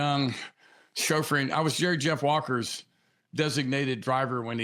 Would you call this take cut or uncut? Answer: uncut